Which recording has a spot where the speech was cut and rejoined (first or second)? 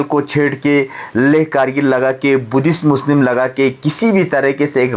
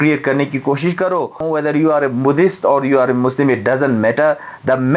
second